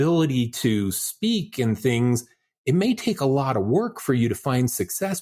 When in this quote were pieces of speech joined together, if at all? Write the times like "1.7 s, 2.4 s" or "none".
none